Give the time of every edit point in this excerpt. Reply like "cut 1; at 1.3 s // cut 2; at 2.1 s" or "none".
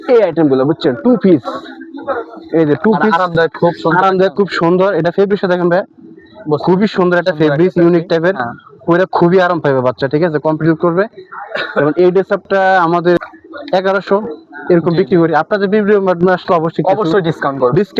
none